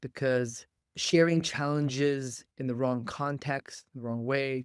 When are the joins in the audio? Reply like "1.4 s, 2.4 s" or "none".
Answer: 0.9 s, 2.4 s